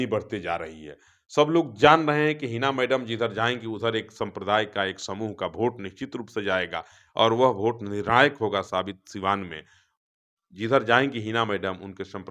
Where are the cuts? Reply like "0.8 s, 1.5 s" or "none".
none